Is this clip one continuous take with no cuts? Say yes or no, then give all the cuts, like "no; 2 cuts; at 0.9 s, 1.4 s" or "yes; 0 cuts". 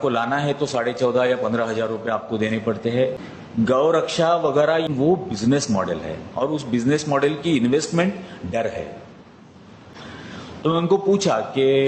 no; 3 cuts; at 3.3 s, 4.9 s, 9.9 s